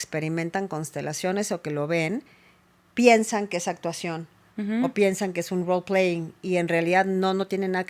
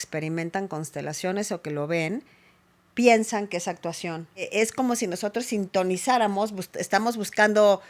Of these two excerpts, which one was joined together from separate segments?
second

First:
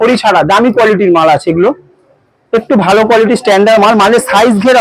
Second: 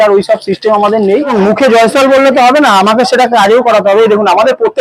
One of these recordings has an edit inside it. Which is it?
second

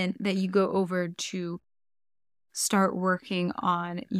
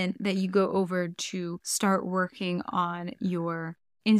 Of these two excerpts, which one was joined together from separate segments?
second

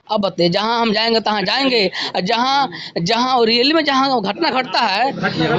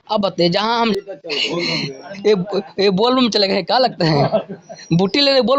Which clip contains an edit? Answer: second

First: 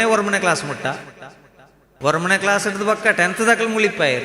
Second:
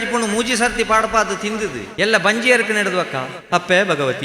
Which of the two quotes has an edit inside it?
second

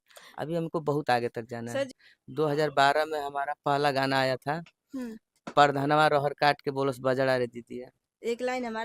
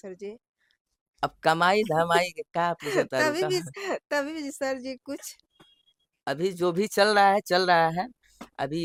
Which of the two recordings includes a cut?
first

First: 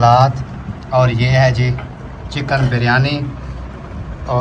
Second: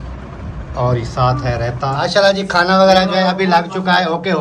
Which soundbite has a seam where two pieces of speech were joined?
second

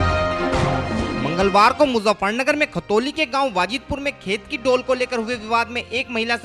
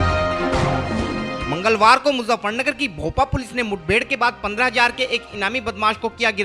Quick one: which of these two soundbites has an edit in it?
first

